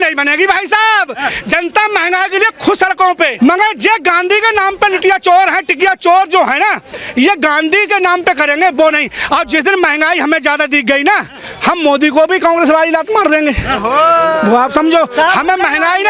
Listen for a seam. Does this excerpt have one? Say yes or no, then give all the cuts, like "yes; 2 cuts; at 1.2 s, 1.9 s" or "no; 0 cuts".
no; 0 cuts